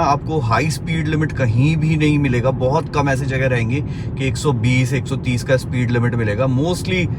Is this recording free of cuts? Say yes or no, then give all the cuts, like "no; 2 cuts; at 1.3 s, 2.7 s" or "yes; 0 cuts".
yes; 0 cuts